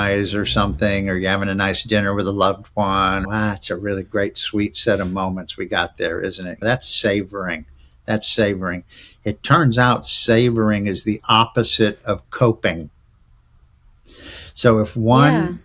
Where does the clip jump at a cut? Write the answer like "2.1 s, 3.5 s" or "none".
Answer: 3.3 s